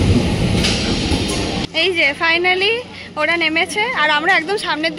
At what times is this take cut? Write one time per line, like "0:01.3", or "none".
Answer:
0:01.7